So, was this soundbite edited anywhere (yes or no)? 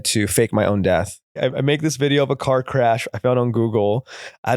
yes